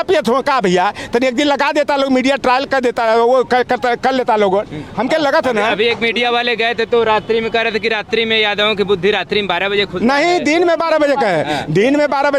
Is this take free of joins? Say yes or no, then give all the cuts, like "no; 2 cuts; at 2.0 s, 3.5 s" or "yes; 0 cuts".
yes; 0 cuts